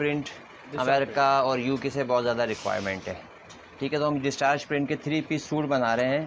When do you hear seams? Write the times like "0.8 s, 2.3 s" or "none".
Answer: none